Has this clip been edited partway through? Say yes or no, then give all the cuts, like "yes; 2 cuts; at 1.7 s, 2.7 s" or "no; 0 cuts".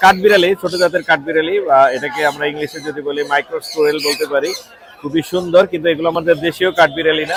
no; 0 cuts